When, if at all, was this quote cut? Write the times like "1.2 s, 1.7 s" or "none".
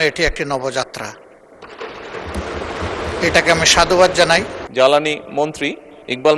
4.6 s